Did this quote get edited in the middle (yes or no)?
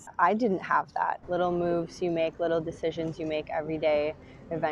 yes